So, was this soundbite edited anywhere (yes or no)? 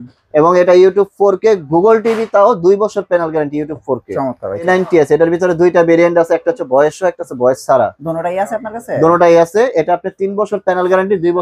yes